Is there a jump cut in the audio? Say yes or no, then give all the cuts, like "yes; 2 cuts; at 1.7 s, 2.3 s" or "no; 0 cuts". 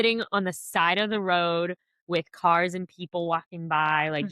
no; 0 cuts